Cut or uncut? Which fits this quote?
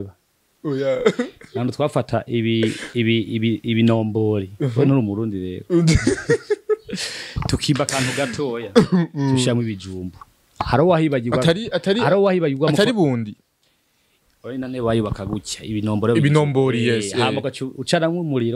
uncut